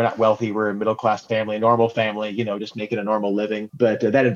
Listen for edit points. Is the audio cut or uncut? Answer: uncut